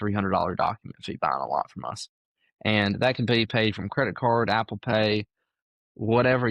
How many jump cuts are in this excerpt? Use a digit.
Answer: 0